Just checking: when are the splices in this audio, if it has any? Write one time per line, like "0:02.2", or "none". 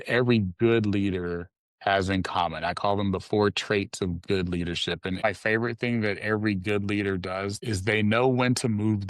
0:05.2
0:07.6